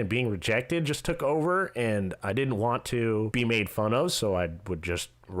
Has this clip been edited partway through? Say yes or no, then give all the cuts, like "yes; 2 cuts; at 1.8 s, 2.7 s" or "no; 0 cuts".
yes; 1 cut; at 3.3 s